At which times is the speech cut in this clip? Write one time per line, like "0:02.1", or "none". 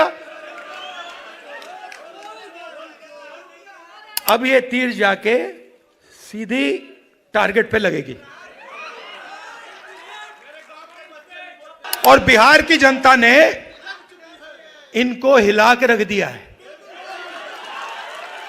0:11.8